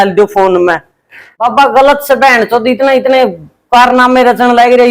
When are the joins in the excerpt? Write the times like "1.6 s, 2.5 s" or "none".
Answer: 1.3 s

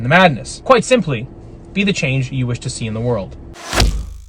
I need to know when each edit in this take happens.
3.4 s

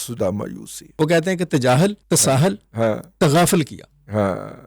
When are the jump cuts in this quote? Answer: 1.0 s, 2.0 s

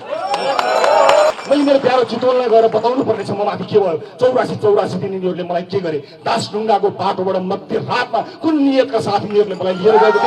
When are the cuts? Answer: 1.3 s

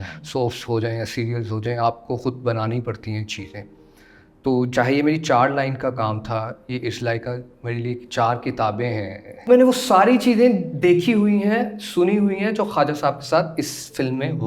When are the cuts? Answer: 9.5 s

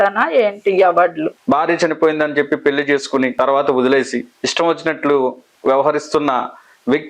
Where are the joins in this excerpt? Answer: 1.4 s, 3.3 s, 4.4 s, 5.5 s

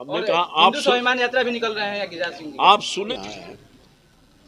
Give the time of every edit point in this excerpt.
3.1 s

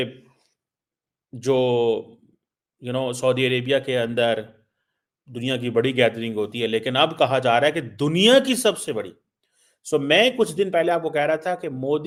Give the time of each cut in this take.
none

